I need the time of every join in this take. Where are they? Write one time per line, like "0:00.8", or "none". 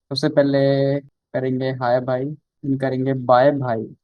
0:01.2
0:02.5